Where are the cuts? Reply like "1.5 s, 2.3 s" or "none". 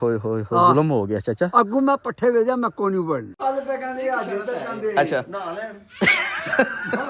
3.4 s